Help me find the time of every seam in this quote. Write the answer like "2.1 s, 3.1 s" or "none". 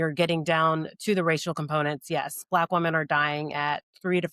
none